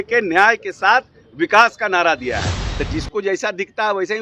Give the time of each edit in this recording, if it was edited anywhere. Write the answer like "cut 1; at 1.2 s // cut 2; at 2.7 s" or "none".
cut 1; at 2.6 s